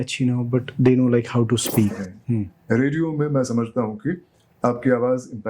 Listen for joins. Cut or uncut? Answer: cut